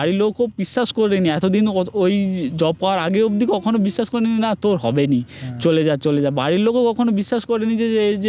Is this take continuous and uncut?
yes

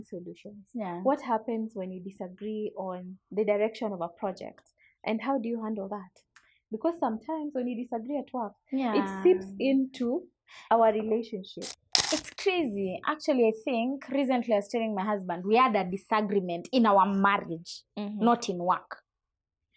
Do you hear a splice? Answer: no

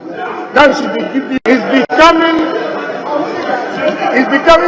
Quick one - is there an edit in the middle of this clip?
no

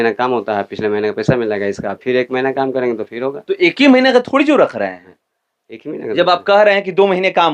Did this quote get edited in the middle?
no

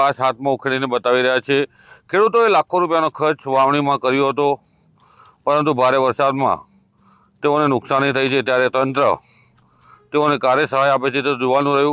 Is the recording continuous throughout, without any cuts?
yes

